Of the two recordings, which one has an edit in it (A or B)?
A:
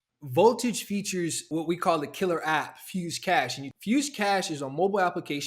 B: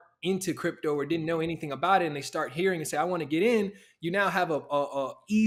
A